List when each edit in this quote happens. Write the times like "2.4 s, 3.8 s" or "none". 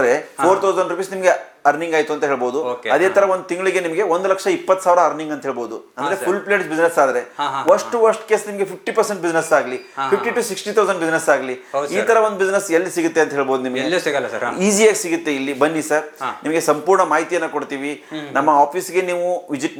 none